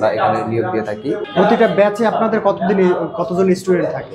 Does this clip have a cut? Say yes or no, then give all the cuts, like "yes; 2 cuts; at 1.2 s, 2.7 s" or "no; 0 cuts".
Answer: no; 0 cuts